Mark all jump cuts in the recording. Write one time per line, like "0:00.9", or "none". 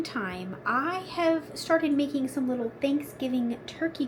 none